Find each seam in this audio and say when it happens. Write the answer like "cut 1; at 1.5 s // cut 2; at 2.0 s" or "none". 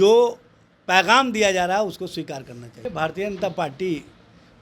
cut 1; at 2.8 s